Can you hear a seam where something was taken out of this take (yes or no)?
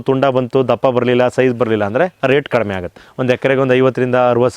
yes